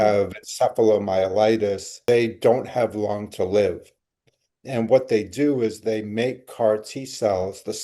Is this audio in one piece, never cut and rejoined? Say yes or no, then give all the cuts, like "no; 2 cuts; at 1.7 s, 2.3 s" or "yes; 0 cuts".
no; 1 cut; at 2.0 s